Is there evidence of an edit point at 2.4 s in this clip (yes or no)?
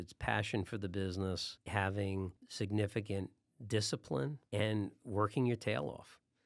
yes